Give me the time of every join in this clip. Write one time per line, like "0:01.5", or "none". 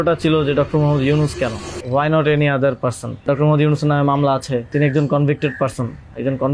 0:01.7
0:03.2
0:04.7